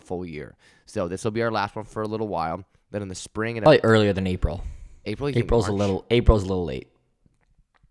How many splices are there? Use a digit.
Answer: 1